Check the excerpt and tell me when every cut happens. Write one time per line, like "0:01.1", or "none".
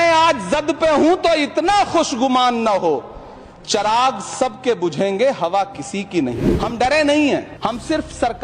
0:06.3
0:07.5